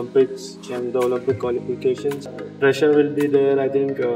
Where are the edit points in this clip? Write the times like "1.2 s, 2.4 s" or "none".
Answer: 2.2 s